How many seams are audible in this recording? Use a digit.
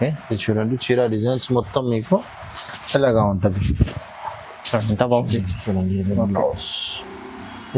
1